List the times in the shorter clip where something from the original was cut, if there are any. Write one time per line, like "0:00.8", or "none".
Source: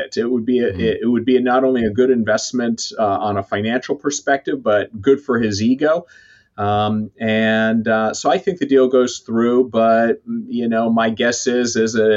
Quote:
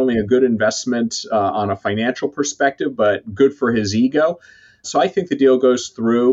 0:04.9